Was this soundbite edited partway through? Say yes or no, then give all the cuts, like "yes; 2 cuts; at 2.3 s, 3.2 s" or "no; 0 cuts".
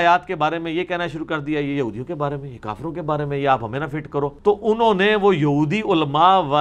no; 0 cuts